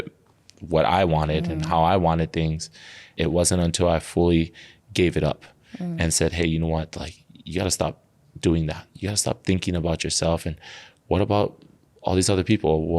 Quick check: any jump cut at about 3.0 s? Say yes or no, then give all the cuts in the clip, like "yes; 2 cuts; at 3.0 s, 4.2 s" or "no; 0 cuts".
yes; 1 cut; at 3.0 s